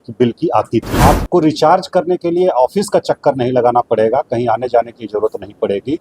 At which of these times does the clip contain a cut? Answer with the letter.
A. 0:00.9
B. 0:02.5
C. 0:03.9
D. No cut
A